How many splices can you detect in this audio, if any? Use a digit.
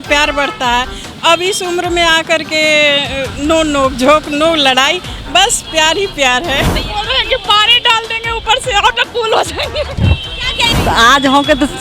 2